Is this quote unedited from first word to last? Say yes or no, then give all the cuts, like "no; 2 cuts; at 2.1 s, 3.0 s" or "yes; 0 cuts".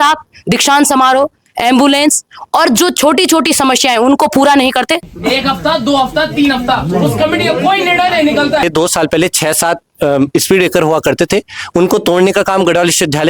no; 2 cuts; at 5.1 s, 8.6 s